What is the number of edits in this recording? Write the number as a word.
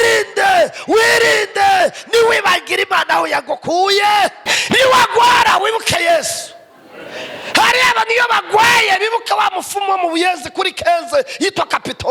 one